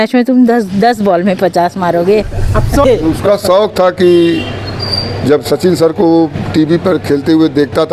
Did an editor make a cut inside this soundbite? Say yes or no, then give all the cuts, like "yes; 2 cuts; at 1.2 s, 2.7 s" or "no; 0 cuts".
yes; 1 cut; at 2.8 s